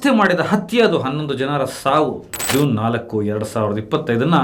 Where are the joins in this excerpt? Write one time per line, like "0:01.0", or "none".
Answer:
0:02.4